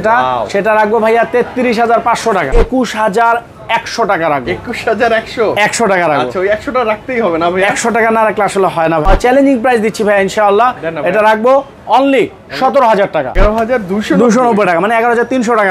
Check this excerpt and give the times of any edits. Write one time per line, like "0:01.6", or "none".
0:02.5
0:09.1
0:13.4